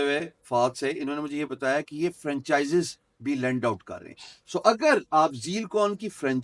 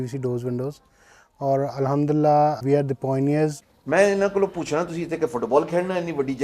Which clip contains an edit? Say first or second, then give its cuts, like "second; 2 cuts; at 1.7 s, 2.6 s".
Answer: second; 2 cuts; at 2.6 s, 3.6 s